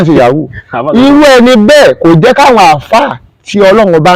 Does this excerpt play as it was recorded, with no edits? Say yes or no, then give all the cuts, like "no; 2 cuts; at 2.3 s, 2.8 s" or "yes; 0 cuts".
yes; 0 cuts